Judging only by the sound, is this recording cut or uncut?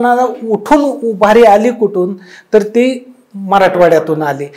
uncut